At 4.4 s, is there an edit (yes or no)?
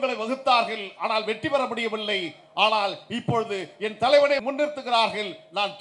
yes